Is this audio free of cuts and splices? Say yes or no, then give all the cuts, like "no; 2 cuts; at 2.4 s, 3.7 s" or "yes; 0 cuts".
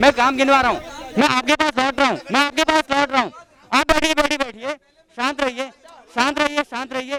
yes; 0 cuts